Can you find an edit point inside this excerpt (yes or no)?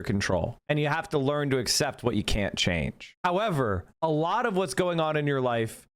no